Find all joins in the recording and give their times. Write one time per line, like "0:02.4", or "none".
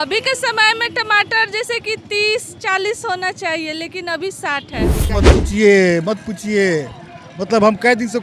0:05.1

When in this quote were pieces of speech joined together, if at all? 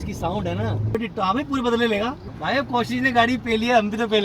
0:01.0
0:02.3

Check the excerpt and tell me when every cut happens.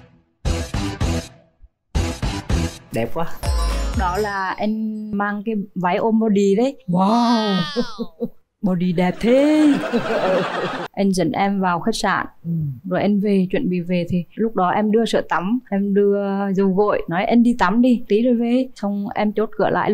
0:03.4
0:05.1
0:10.8

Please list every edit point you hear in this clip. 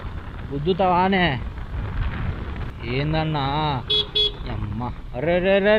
0:02.7

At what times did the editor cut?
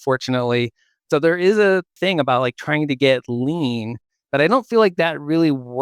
0:02.0

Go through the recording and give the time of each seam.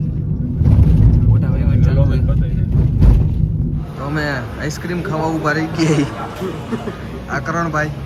0:03.9

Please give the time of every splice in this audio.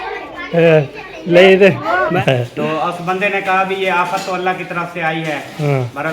0:02.1

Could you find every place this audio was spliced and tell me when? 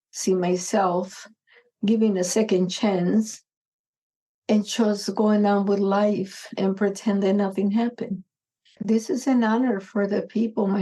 0:08.8

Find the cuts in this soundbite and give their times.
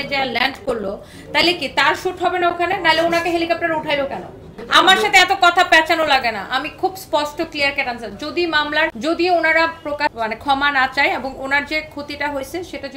0:04.6
0:09.0
0:10.1

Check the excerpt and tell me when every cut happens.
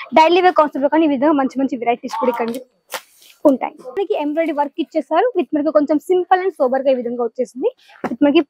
0:04.0

